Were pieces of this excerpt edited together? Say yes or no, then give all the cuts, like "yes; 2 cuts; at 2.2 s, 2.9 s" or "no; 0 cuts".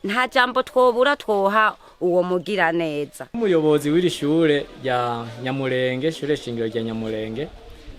yes; 1 cut; at 3.2 s